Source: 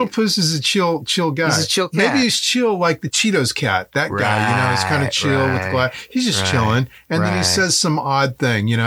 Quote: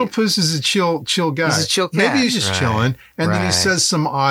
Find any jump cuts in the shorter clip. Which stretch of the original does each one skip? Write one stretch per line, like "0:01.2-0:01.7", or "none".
0:02.4-0:06.3